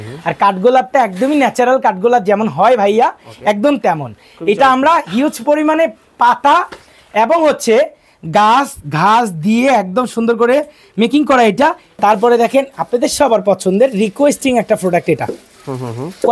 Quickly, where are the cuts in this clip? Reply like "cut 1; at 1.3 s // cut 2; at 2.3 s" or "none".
cut 1; at 11.9 s